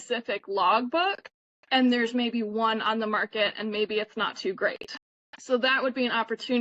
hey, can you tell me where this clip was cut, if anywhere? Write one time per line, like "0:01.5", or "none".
none

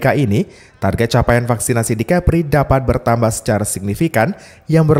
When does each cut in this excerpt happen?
none

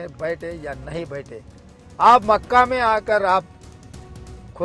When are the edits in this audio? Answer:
none

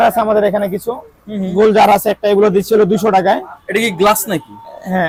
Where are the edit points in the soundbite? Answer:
none

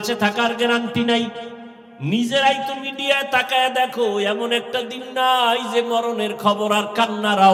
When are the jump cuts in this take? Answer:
none

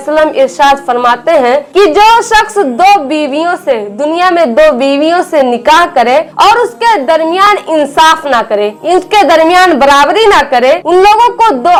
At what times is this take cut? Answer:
none

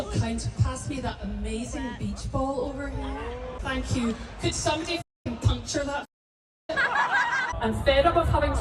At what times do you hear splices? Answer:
0:03.6
0:07.5

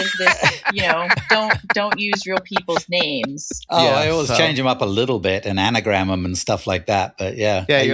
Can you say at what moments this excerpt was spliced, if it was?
0:03.6

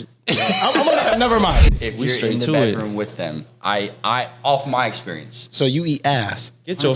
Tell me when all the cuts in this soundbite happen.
0:01.7

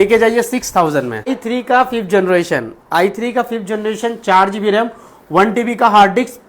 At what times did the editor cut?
0:01.4

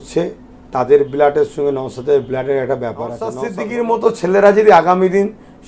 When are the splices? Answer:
0:03.4

